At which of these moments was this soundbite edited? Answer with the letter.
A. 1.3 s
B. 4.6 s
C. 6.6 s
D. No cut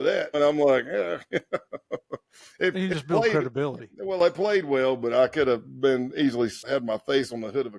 C